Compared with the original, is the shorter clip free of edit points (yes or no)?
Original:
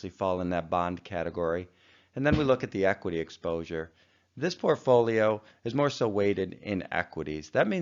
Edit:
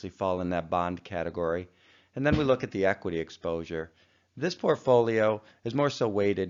yes